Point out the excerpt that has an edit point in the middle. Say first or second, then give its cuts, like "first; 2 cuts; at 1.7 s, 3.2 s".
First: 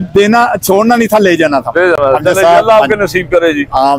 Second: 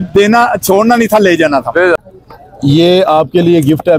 second; 1 cut; at 2.0 s